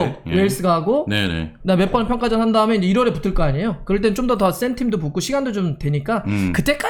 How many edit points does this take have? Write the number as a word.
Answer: zero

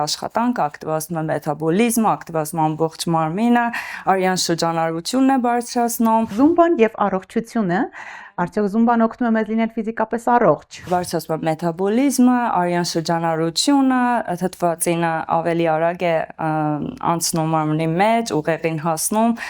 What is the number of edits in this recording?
two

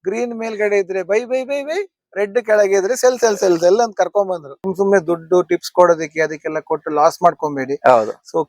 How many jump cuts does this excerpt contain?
one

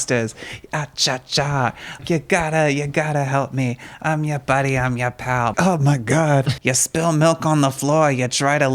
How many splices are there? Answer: three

